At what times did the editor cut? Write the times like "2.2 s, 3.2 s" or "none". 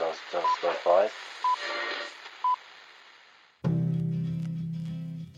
3.7 s